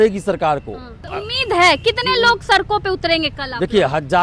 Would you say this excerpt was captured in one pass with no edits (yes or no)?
no